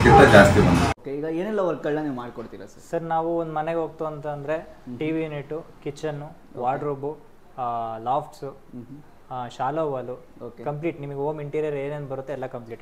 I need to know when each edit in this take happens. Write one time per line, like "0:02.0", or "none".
0:01.0